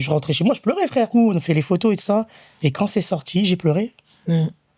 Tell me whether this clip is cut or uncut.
cut